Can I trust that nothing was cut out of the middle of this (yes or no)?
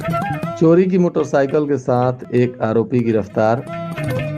yes